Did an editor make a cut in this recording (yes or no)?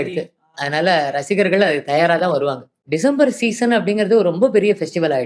yes